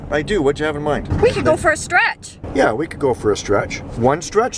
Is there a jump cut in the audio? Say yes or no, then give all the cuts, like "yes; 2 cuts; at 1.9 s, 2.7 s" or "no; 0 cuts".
yes; 2 cuts; at 1.1 s, 2.3 s